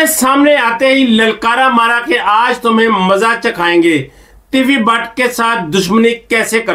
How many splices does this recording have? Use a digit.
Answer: 0